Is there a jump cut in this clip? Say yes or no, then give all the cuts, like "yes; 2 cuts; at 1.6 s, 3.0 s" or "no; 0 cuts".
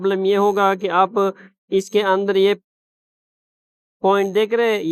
no; 0 cuts